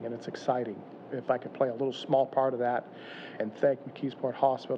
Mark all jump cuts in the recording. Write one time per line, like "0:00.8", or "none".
0:01.1
0:03.4